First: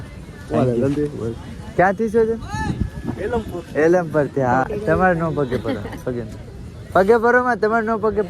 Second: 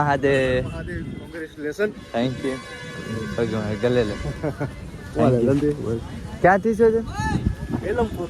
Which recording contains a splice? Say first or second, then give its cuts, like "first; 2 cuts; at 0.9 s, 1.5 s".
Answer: first; 1 cut; at 4.6 s